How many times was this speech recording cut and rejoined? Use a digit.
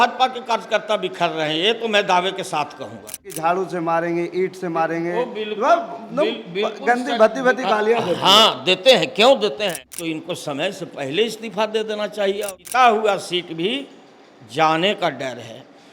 3